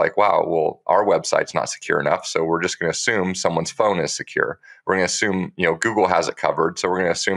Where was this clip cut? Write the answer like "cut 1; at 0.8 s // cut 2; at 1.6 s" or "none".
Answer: none

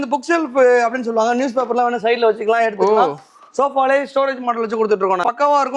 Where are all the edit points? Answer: none

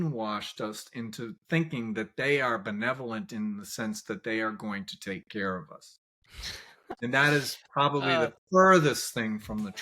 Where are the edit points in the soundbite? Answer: cut 1; at 6.8 s

